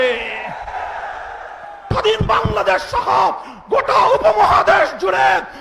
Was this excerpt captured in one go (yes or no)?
no